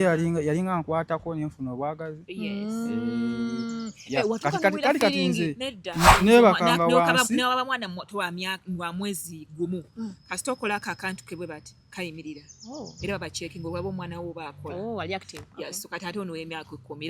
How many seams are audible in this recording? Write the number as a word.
one